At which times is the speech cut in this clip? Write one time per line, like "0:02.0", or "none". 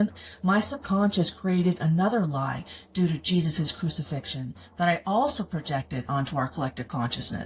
none